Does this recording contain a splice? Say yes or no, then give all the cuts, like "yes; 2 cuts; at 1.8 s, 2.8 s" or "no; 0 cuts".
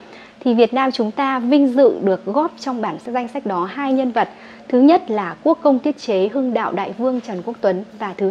yes; 1 cut; at 3.0 s